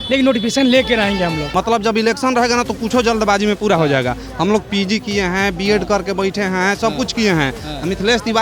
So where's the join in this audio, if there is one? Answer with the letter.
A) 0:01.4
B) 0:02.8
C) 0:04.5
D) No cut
A